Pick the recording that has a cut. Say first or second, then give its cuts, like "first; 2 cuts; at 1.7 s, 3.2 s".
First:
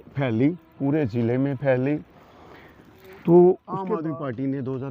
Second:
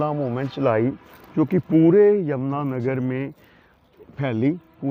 first; 1 cut; at 3.7 s